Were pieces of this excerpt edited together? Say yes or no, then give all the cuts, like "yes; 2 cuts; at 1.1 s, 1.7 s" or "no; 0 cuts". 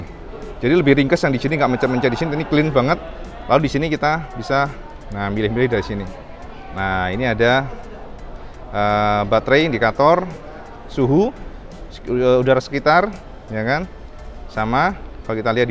no; 0 cuts